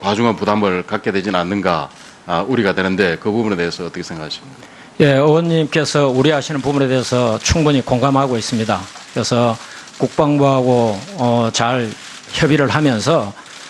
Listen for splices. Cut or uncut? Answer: uncut